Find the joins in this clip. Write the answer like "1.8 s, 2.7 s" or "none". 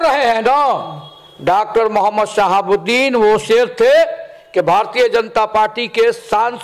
none